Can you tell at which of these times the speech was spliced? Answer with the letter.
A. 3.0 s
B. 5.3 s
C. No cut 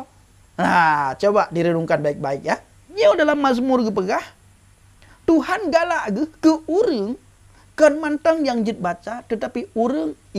A